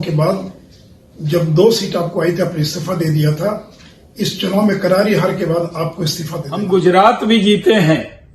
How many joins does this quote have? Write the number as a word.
one